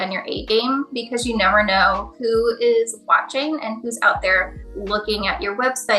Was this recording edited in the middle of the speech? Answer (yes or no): no